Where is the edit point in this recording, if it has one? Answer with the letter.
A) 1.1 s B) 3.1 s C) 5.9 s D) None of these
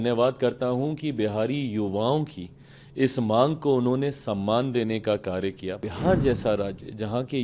C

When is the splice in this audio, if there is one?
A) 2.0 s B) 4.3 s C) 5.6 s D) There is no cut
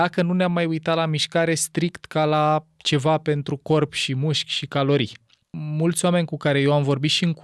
C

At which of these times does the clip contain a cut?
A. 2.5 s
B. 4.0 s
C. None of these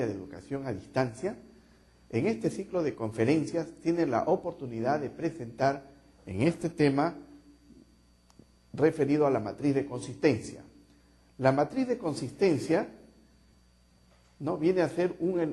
C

